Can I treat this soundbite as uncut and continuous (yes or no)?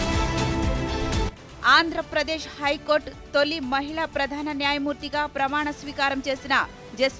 no